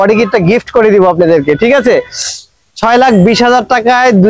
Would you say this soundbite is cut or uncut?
uncut